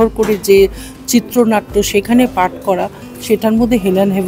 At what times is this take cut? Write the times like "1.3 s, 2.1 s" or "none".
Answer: none